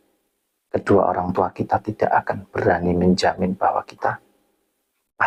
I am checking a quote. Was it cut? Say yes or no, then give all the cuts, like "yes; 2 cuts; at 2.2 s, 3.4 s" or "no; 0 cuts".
no; 0 cuts